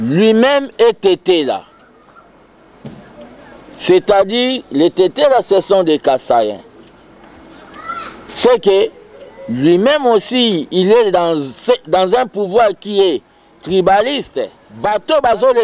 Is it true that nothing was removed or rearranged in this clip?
no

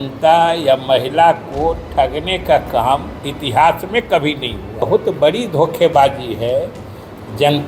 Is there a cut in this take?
yes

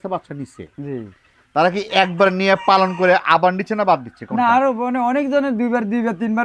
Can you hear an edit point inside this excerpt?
no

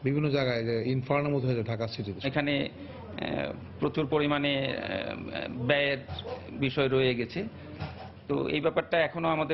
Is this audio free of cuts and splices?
yes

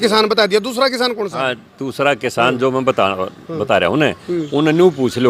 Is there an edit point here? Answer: no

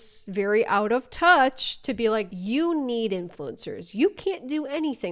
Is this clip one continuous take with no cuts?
yes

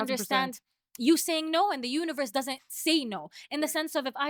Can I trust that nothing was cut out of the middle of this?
yes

